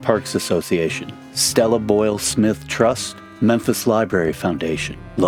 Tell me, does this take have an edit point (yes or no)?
no